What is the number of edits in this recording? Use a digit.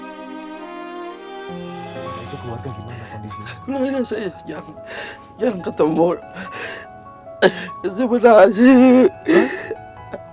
1